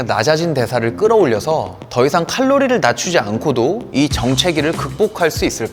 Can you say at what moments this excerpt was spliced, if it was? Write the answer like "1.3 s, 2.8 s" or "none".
none